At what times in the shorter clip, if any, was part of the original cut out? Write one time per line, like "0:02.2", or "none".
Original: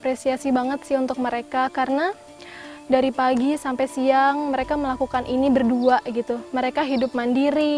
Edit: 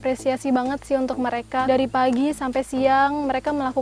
0:01.7